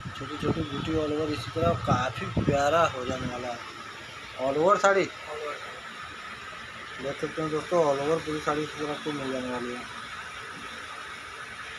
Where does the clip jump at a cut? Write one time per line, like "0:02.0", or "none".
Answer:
none